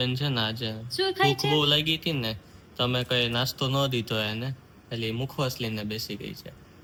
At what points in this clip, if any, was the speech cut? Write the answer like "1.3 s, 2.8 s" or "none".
none